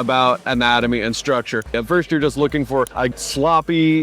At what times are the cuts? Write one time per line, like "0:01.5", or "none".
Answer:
0:01.8
0:03.0